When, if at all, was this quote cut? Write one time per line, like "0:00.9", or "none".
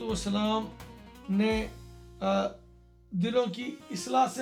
none